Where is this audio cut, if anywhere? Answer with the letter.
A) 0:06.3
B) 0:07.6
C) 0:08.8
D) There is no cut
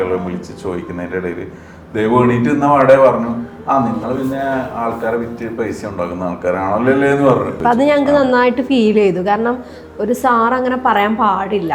B